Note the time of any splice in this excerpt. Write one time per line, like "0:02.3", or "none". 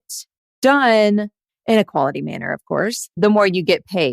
0:03.2